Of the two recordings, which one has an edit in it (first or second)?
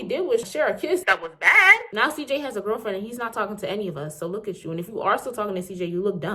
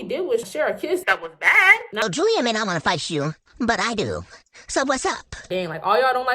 second